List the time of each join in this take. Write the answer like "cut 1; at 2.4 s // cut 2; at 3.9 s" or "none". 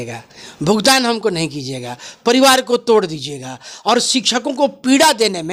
none